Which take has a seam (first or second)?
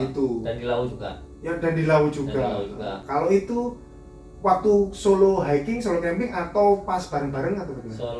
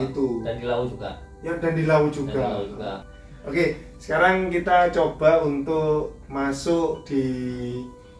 second